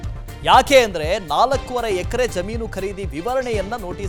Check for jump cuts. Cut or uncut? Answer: uncut